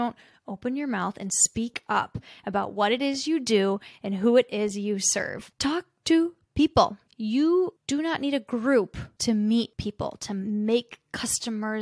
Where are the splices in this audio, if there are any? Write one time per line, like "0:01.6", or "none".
0:05.5
0:07.0
0:07.8
0:09.0
0:10.1